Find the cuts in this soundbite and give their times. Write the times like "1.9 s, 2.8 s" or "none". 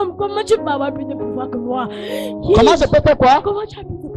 none